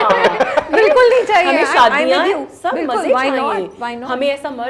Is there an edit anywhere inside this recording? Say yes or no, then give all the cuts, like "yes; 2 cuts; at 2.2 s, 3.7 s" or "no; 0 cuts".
no; 0 cuts